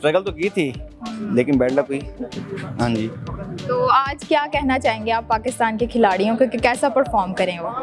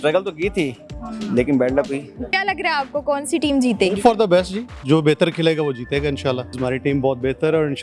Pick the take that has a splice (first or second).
second